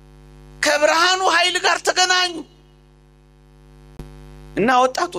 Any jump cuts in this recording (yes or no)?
yes